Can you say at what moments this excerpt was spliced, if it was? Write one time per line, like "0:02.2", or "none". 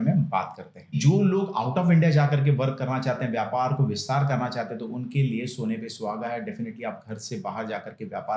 0:01.0

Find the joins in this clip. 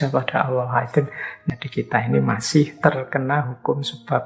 0:01.3
0:02.7

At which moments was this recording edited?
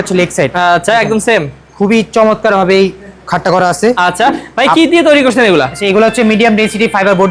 none

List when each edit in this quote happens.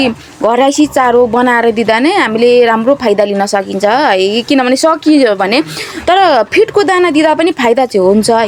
none

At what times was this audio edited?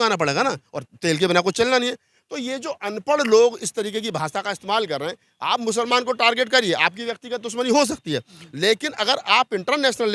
none

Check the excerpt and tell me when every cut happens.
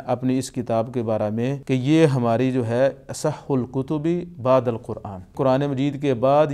0:01.6
0:05.3

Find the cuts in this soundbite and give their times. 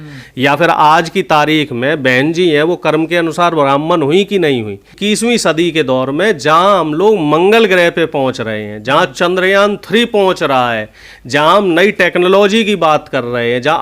0:04.9

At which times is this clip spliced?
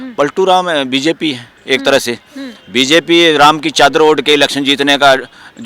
none

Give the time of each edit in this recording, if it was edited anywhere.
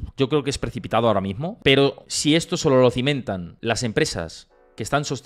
0:01.5
0:02.1
0:03.5

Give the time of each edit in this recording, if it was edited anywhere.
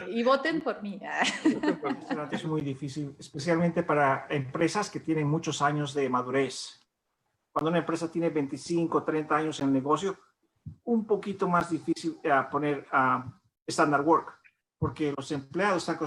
0:02.3

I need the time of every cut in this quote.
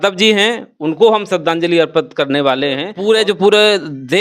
0:02.9

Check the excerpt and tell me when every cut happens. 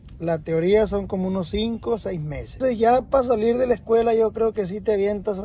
0:02.6

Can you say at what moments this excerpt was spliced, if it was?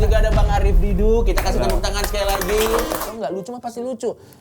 0:03.1

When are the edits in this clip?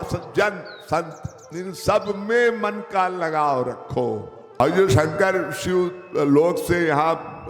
0:04.4

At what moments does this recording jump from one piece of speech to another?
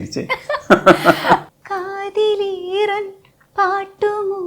0:01.5

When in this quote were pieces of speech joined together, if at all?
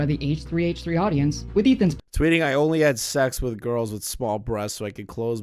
none

